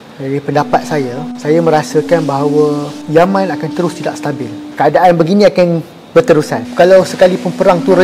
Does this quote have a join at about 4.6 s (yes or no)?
yes